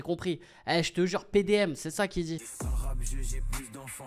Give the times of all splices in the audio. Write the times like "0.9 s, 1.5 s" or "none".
2.5 s